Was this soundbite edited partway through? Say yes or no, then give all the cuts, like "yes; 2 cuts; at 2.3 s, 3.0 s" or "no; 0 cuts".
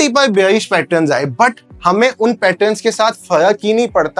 no; 0 cuts